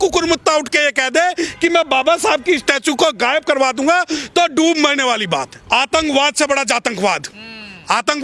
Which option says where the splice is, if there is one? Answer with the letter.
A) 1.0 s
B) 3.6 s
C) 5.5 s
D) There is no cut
C